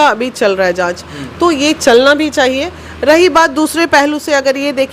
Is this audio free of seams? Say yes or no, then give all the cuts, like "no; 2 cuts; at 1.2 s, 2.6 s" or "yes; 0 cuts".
yes; 0 cuts